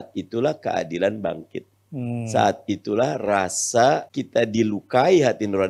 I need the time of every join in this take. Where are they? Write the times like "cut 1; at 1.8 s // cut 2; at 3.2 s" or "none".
cut 1; at 4.1 s